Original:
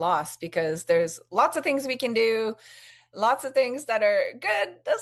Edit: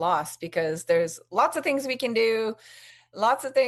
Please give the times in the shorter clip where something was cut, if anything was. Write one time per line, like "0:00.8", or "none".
none